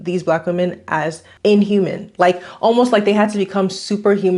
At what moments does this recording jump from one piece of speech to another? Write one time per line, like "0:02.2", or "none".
0:01.2